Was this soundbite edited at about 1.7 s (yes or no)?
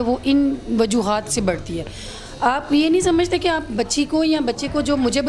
no